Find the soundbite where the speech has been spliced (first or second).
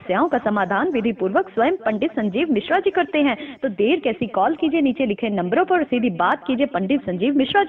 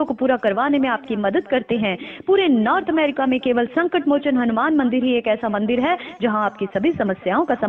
second